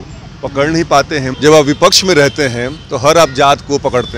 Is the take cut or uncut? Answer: cut